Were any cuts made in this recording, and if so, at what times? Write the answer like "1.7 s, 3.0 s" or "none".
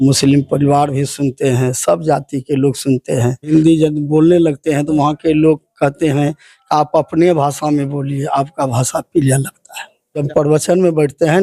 3.5 s, 10.2 s

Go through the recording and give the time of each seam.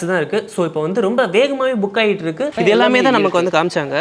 2.5 s

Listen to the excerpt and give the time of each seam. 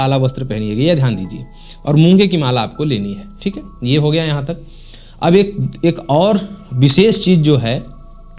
none

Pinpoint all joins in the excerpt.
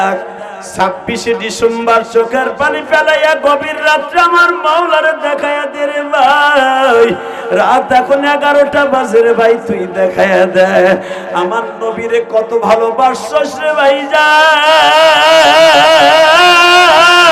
none

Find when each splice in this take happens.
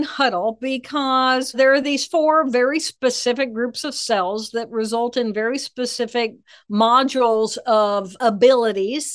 1.5 s, 7.7 s

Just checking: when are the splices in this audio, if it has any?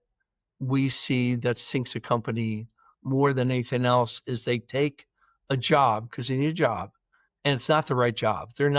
none

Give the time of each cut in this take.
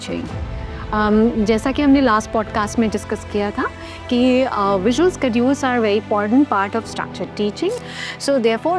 7.8 s

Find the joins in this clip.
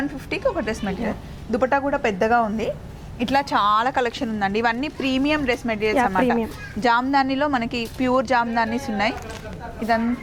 none

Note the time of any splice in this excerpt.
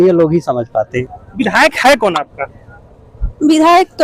1.0 s

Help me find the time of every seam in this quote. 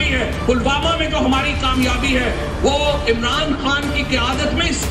none

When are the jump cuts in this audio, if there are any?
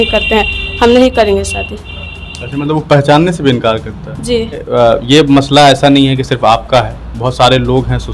4.7 s

